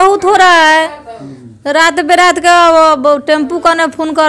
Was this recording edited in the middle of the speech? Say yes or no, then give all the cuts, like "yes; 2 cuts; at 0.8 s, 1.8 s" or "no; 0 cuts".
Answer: no; 0 cuts